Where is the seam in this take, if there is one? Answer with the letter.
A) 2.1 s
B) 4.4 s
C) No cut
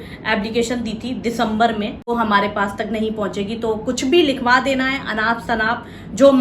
A